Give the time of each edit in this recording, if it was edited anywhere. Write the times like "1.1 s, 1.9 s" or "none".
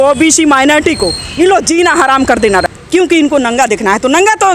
2.8 s